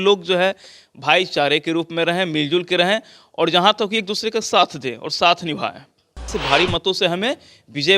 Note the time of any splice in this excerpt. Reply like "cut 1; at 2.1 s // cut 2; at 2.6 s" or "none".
cut 1; at 6.4 s

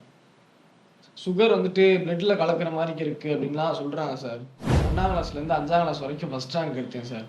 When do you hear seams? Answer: cut 1; at 4.9 s

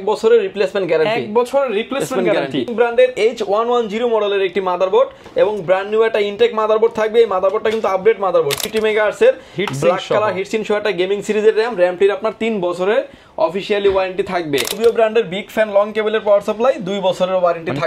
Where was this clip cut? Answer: cut 1; at 2.7 s // cut 2; at 8.6 s // cut 3; at 14.8 s

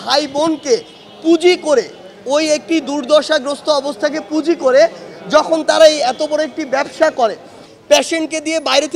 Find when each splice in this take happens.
cut 1; at 7.7 s

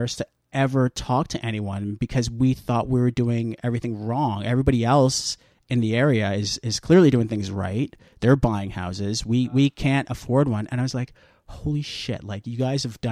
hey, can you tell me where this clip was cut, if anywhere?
none

